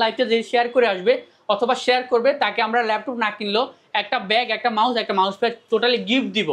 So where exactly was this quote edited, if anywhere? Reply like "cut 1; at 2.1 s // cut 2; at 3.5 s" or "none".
none